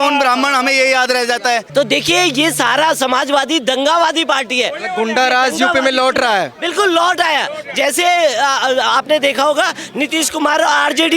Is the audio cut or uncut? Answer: cut